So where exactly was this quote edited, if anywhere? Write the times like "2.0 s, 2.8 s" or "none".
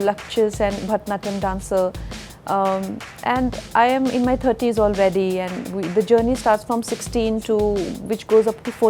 none